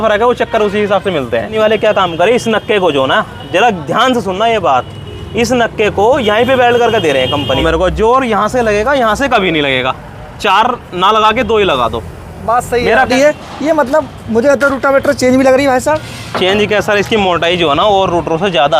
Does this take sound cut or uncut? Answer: cut